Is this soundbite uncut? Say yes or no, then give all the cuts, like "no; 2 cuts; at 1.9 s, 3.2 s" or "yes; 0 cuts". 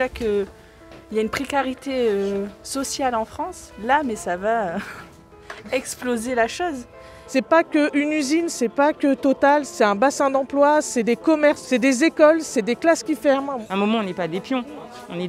no; 4 cuts; at 7.1 s, 9.7 s, 11.6 s, 13.5 s